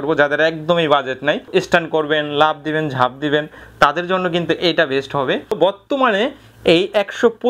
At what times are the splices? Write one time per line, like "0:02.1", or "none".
0:01.5
0:05.5